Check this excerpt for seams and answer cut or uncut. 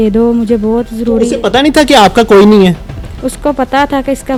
uncut